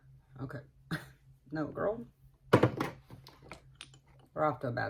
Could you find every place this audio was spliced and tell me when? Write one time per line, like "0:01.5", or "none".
none